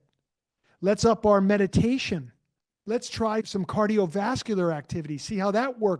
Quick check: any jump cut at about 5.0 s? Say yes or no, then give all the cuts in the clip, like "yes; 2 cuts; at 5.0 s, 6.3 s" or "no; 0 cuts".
no; 1 cut; at 3.5 s